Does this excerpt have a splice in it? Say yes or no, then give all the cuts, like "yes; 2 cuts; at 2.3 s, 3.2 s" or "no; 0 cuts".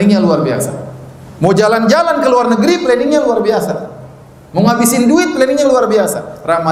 no; 0 cuts